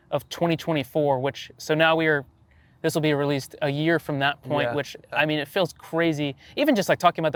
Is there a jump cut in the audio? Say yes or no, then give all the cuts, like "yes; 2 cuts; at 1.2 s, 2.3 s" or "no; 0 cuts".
no; 0 cuts